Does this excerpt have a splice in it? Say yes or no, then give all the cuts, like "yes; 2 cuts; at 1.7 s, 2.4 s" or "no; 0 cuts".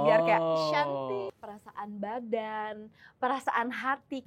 yes; 1 cut; at 1.4 s